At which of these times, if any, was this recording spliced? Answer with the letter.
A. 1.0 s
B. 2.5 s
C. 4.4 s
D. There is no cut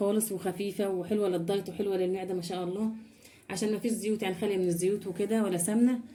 D